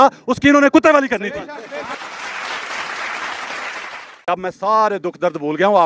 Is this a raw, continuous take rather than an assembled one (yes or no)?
no